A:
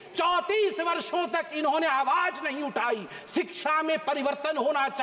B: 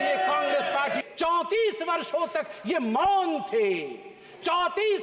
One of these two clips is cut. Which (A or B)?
B